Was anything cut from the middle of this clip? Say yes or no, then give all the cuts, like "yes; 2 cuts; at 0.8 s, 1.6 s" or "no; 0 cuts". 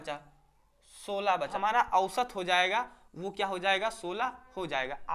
yes; 1 cut; at 1.5 s